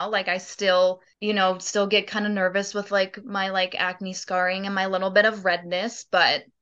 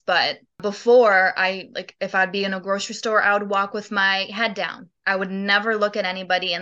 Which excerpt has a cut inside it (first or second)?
first